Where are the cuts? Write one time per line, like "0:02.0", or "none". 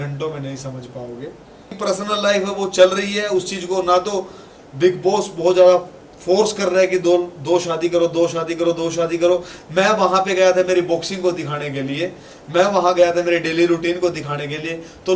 0:01.7